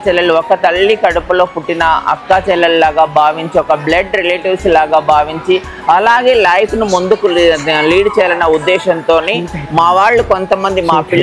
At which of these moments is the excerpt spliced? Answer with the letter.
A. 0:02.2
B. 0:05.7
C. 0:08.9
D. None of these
D